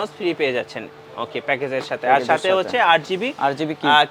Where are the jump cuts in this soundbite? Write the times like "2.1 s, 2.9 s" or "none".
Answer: none